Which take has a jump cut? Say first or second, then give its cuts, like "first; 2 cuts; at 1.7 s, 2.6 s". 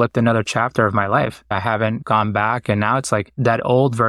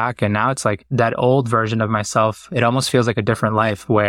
first; 1 cut; at 1.5 s